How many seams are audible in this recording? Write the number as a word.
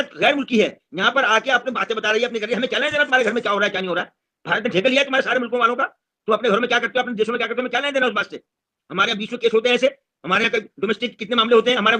zero